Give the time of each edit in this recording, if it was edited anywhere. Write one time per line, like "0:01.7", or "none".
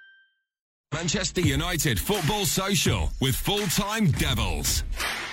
0:00.9